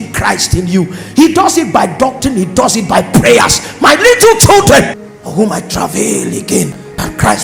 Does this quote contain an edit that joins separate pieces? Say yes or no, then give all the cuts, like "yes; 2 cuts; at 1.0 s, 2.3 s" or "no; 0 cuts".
yes; 1 cut; at 5.1 s